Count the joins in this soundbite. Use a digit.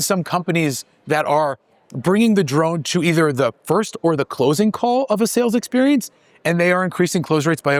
0